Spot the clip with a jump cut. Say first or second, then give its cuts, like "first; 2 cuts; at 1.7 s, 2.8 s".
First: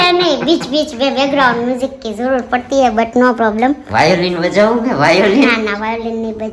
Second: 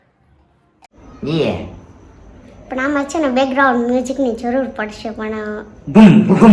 second; 1 cut; at 0.9 s